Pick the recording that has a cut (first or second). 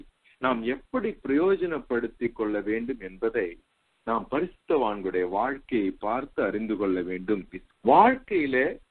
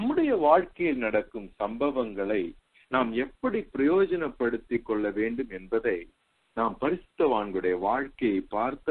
first